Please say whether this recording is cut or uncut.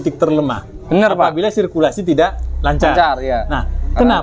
uncut